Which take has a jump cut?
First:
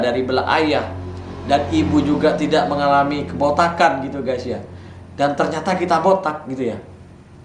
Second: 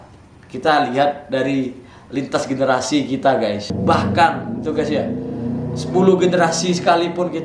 second; 1 cut; at 3.7 s

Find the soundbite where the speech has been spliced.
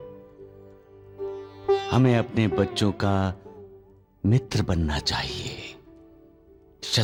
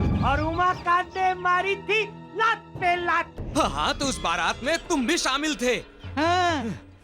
second; 1 cut; at 3.4 s

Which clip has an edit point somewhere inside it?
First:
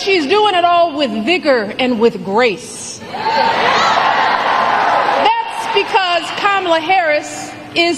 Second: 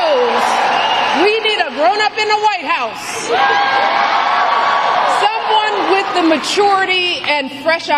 first; 1 cut; at 5.0 s

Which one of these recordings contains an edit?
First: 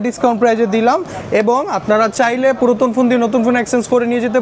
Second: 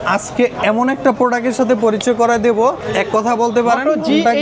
second; 1 cut; at 2.8 s

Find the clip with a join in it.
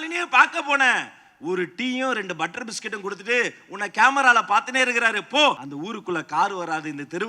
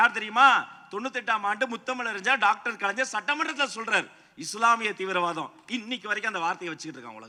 first; 1 cut; at 5.6 s

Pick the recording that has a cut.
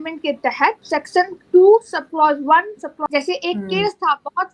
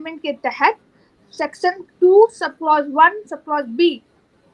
first; 2 cuts; at 0.8 s, 3.0 s

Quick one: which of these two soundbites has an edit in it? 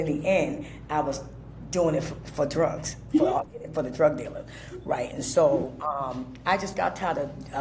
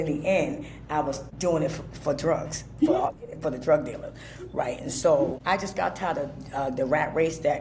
second; 2 cuts; at 1.3 s, 5.4 s

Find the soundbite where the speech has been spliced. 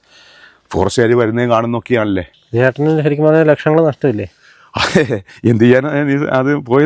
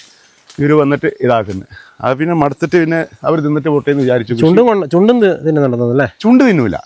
first; 1 cut; at 2.4 s

